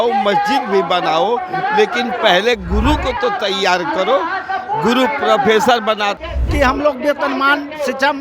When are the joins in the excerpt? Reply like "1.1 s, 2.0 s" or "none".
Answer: 6.2 s